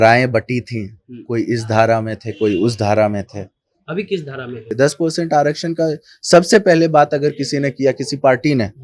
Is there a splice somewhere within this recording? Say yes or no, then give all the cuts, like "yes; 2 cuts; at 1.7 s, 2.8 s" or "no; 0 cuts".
yes; 1 cut; at 4.7 s